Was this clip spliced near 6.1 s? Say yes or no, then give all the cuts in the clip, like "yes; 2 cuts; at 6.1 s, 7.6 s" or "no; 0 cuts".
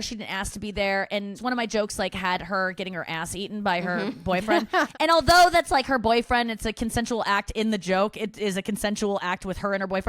no; 1 cut; at 1.4 s